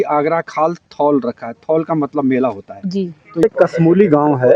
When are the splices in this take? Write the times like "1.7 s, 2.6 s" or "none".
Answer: 3.4 s